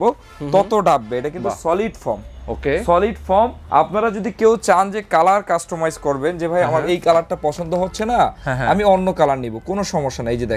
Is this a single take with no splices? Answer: no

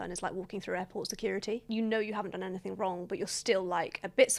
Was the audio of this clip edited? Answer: no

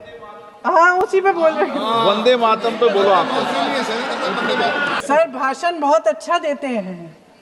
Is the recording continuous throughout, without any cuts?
no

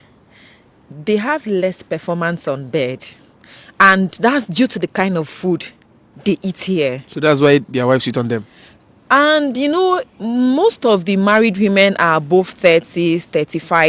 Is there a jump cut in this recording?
no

